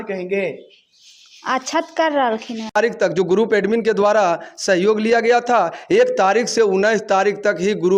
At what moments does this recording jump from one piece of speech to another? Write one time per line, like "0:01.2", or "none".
0:02.8